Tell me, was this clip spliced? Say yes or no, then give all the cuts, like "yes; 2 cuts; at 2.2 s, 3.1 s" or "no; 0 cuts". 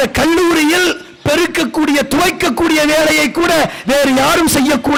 no; 0 cuts